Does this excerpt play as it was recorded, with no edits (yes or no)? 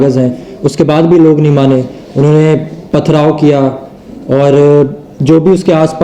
yes